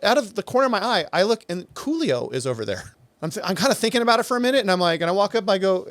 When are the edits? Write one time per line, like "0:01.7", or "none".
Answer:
0:02.9